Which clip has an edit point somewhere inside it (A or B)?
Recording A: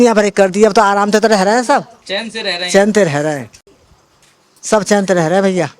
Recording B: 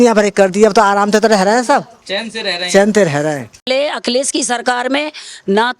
B